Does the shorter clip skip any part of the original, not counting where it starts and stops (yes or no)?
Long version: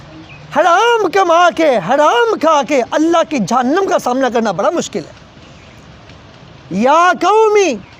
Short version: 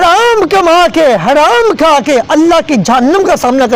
no